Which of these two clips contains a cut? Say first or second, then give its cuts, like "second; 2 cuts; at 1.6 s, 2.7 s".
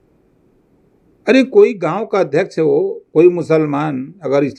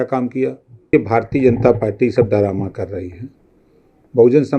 second; 1 cut; at 0.9 s